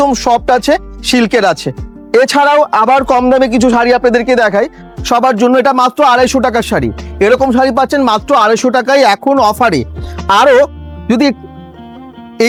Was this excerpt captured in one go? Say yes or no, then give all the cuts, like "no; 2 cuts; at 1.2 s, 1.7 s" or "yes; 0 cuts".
yes; 0 cuts